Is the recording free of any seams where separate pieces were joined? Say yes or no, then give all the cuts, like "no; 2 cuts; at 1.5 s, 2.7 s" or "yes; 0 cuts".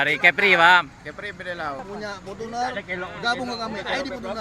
no; 1 cut; at 1.8 s